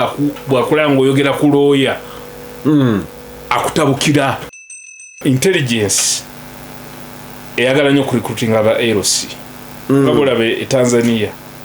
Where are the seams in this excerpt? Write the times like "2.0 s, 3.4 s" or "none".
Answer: 4.8 s